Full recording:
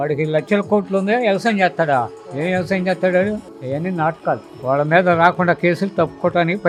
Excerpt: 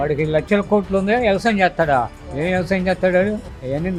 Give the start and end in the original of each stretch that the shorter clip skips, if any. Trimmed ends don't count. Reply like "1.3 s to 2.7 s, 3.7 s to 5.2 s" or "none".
none

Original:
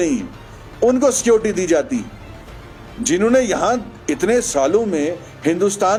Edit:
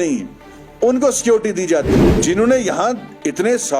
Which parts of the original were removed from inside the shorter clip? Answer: 2.1 s to 2.9 s

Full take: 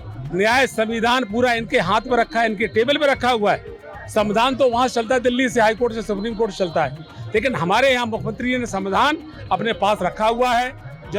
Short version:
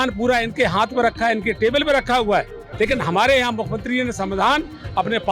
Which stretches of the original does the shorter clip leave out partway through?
3.7 s to 7.1 s

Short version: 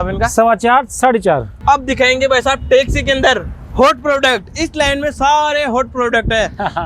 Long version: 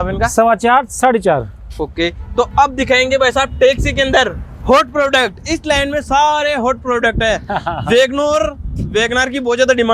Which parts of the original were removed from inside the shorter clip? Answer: 1.6 s to 2.5 s

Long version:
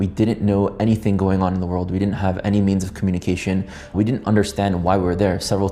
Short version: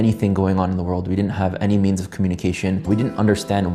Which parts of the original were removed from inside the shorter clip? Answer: 3.7 s to 3.9 s

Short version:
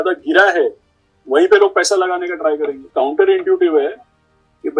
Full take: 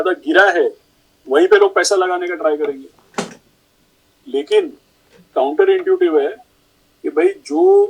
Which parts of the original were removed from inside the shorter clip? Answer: 2.8 s to 5.2 s

